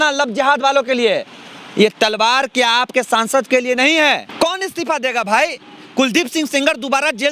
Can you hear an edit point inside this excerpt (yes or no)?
yes